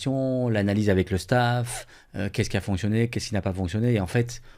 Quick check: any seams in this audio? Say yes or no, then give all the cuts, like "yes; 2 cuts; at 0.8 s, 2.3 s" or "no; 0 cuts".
no; 0 cuts